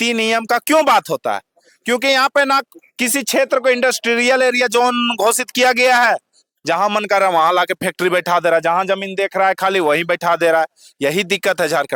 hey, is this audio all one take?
yes; 0 cuts

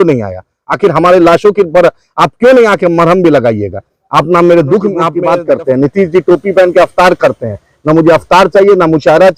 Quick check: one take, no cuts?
no; 1 cut; at 5.1 s

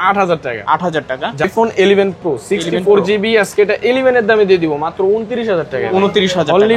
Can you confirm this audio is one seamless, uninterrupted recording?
no; 1 cut; at 1.4 s

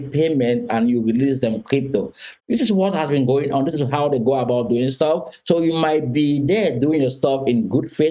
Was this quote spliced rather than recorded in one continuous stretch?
no; 0 cuts

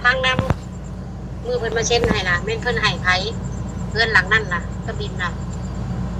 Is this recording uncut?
yes; 0 cuts

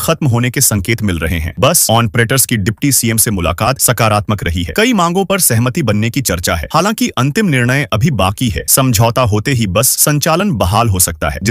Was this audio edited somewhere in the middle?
no; 0 cuts

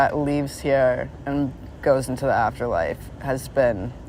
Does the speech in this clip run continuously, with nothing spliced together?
no; 1 cut; at 1.1 s

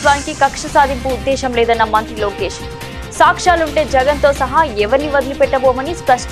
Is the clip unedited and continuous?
yes; 0 cuts

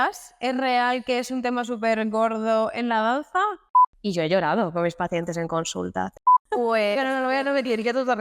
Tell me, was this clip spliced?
yes; 2 cuts; at 3.6 s, 6.1 s

